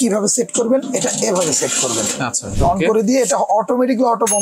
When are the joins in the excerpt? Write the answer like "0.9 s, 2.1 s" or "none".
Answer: 2.5 s